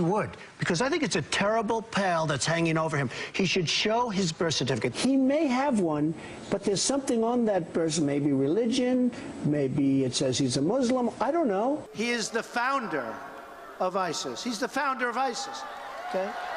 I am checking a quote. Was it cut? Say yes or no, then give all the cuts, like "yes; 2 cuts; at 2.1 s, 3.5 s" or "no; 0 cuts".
yes; 1 cut; at 6.5 s